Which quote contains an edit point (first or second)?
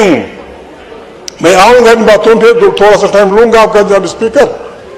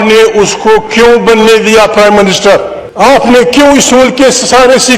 second